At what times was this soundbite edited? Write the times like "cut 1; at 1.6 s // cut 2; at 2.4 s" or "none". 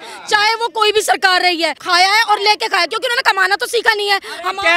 cut 1; at 1.8 s